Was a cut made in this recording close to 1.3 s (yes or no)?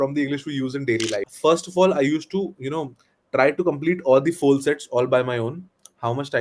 yes